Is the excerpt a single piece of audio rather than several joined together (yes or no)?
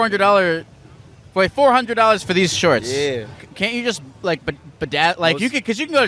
no